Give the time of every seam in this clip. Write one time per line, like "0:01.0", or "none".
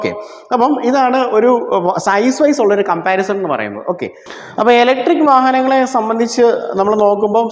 0:04.2